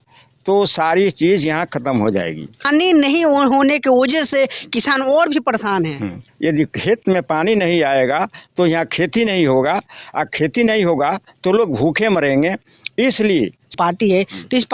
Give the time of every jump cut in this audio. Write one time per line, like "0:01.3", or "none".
0:02.6
0:06.2
0:13.7